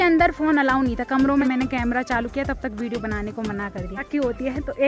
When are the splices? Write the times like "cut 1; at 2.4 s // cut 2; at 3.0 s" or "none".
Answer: cut 1; at 1.4 s // cut 2; at 4.1 s